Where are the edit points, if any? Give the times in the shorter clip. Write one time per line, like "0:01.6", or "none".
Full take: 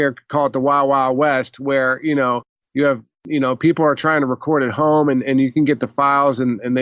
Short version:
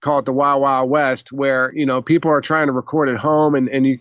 0:01.7